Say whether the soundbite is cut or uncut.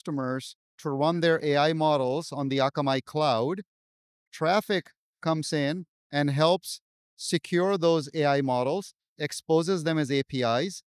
uncut